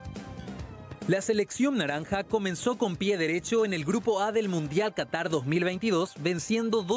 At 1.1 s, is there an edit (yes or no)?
yes